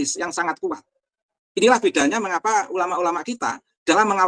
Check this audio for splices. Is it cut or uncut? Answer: uncut